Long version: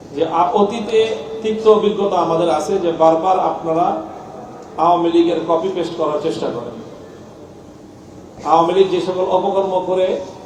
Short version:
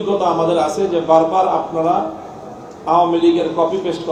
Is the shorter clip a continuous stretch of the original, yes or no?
yes